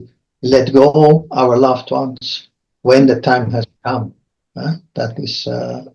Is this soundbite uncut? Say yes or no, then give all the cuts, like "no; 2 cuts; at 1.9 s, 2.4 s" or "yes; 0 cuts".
yes; 0 cuts